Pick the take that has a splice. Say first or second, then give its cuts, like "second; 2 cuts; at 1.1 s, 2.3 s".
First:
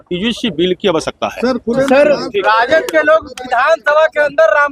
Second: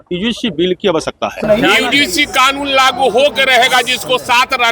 second; 1 cut; at 1.4 s